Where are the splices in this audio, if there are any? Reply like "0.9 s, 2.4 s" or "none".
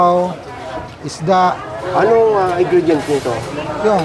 1.9 s